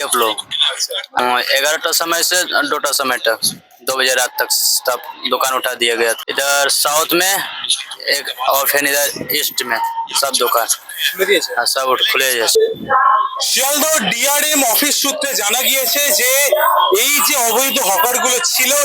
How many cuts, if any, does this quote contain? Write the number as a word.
three